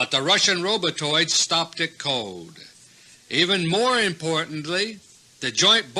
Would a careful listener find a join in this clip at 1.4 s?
yes; 1 cut; at 1.4 s

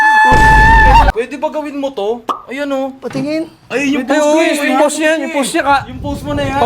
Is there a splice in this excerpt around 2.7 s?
no; 1 cut; at 1.1 s

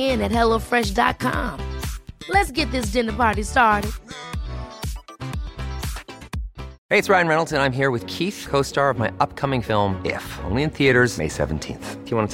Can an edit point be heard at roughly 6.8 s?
yes; 1 cut; at 6.8 s

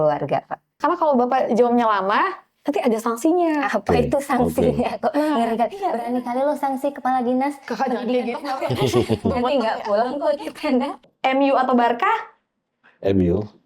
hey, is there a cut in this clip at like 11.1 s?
yes; 2 cuts; at 0.8 s, 11.1 s

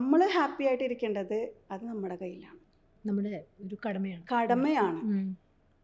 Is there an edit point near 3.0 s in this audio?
no; 0 cuts

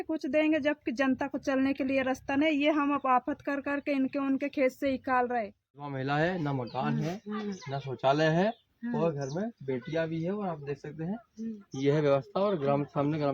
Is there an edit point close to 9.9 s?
no; 1 cut; at 5.9 s

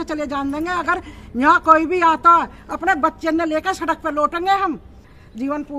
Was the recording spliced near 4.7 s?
no; 0 cuts

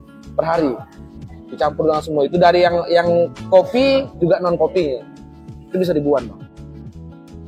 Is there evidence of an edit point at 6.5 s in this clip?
yes; 1 cut; at 6.5 s

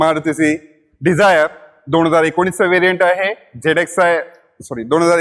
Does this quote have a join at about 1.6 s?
no; 0 cuts

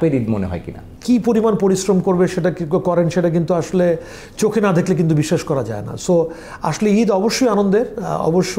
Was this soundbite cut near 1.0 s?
yes; 1 cut; at 1.0 s

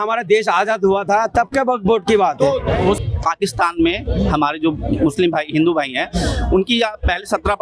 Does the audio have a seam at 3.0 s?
yes; 1 cut; at 3.0 s

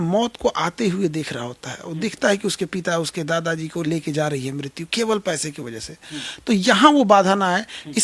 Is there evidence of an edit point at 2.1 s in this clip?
no; 0 cuts

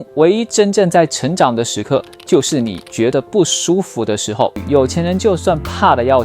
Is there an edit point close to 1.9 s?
no; 1 cut; at 4.6 s

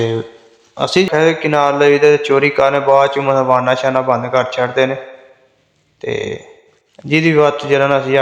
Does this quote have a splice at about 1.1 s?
yes; 1 cut; at 1.1 s

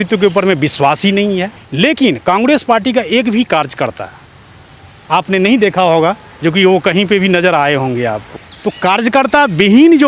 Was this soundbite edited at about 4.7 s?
no; 2 cuts; at 1.6 s, 8.3 s

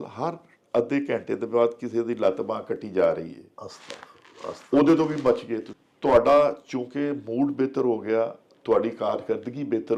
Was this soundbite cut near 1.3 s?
no; 1 cut; at 5.6 s

